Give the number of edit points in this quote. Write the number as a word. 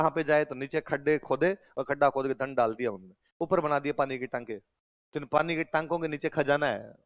zero